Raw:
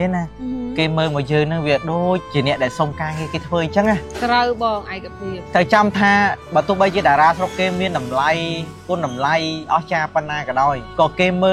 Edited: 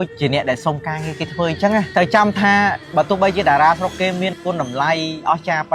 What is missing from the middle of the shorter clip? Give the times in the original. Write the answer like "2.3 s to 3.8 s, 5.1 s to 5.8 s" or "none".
4.0 s to 5.5 s, 7.9 s to 8.8 s